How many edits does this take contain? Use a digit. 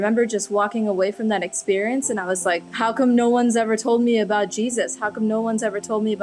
1